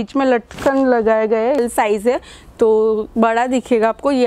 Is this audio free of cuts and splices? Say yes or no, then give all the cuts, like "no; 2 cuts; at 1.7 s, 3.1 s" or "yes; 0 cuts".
no; 1 cut; at 1.6 s